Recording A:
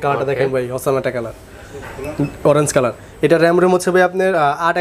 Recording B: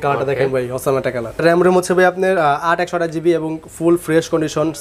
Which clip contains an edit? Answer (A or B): B